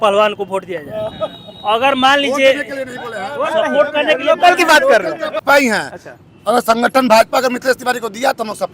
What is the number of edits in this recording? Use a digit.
1